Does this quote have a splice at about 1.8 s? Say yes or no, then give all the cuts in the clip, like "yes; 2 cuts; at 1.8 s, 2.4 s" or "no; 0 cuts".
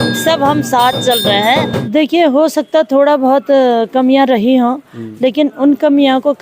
yes; 1 cut; at 1.8 s